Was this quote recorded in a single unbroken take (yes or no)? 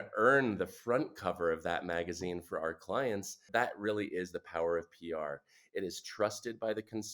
no